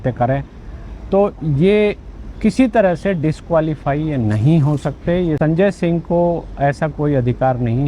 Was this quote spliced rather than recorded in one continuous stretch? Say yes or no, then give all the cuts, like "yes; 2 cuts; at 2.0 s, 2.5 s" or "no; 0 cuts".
yes; 1 cut; at 5.4 s